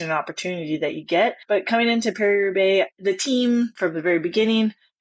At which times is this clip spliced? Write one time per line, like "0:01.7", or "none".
0:01.4
0:02.9
0:03.7